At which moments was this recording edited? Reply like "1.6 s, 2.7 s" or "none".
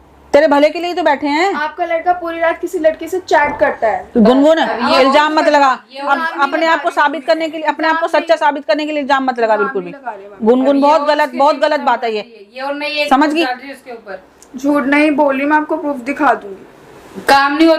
none